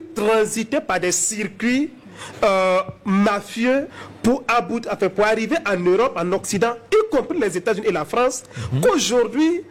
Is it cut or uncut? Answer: uncut